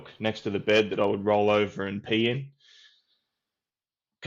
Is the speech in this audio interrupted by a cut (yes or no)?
no